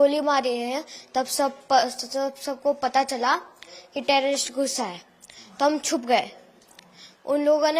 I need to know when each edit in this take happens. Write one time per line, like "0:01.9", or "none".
none